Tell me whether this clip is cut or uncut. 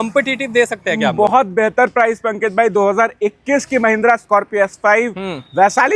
uncut